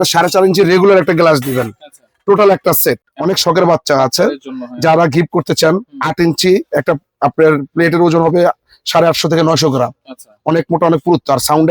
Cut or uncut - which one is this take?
cut